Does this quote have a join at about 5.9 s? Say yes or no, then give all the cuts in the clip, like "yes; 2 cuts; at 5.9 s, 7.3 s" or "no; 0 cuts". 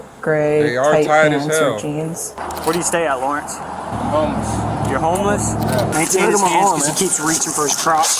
yes; 1 cut; at 5.9 s